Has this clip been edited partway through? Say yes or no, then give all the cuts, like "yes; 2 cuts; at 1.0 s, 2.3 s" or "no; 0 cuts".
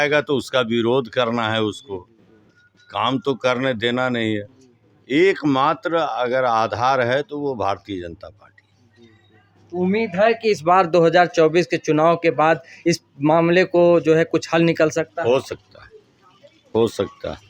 no; 0 cuts